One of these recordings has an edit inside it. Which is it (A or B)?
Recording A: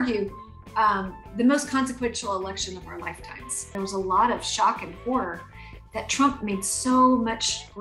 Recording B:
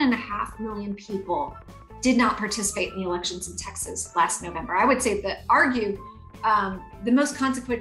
A